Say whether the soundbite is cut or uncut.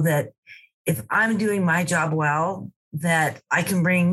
uncut